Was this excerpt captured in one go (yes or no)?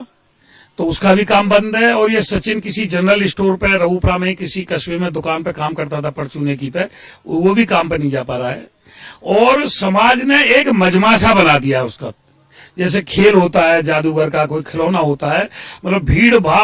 yes